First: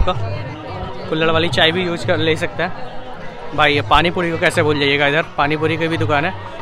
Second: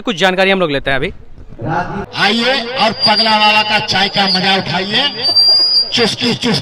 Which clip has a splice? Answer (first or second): second